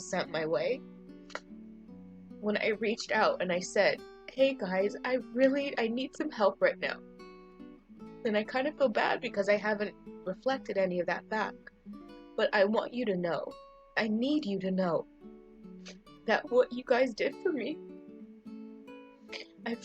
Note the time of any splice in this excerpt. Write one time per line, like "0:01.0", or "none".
none